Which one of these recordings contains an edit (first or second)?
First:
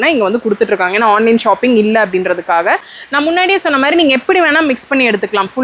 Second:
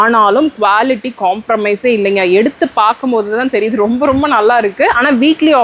first